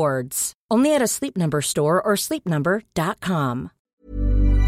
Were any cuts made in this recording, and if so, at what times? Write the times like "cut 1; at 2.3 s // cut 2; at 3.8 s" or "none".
cut 1; at 3.8 s